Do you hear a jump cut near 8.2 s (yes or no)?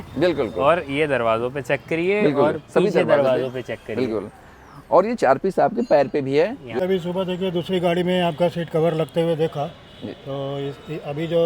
no